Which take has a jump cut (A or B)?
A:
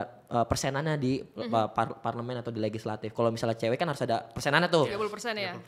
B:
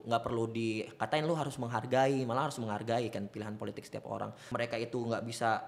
B